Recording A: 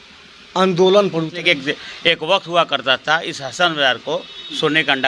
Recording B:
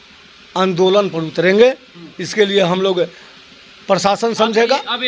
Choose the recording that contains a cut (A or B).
A